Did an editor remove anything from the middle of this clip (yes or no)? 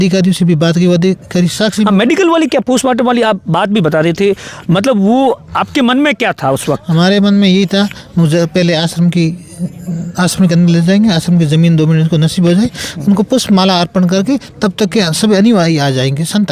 no